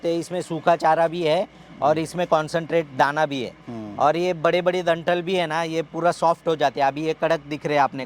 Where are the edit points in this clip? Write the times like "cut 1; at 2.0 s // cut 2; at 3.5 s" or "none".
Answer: none